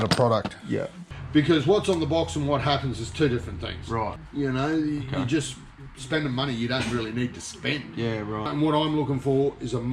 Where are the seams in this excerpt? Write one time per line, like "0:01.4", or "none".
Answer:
0:01.1
0:04.2
0:08.5